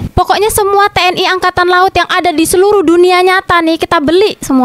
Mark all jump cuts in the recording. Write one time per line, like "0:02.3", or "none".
none